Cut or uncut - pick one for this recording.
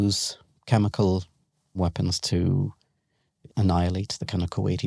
cut